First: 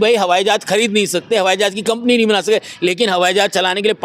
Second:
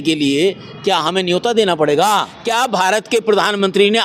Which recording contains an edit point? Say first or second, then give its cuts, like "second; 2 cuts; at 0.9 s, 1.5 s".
second; 1 cut; at 2.3 s